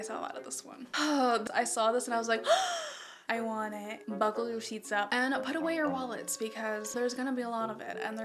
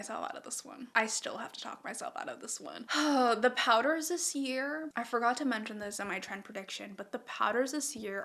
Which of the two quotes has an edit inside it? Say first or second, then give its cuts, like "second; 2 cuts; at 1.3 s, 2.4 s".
first; 3 cuts; at 0.8 s, 1.4 s, 4.0 s